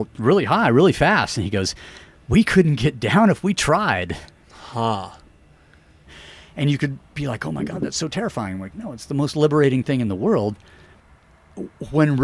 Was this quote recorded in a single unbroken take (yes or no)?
no